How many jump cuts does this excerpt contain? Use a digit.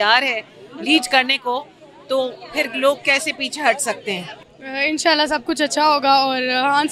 1